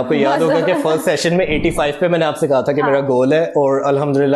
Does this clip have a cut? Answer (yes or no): no